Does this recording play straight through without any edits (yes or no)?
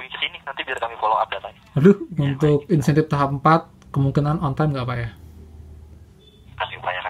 no